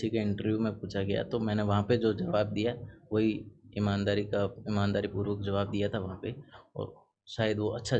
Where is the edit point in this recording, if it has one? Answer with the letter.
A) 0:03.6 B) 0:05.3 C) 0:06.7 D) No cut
D